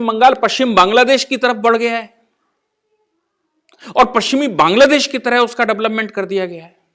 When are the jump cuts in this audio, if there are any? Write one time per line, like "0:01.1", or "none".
none